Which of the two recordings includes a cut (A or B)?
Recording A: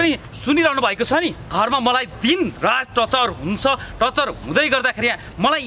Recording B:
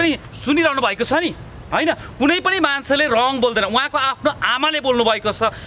A